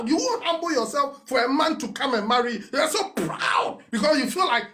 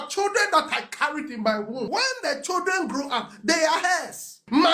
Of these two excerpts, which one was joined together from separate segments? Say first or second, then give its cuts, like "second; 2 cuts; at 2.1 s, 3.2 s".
second; 1 cut; at 1.8 s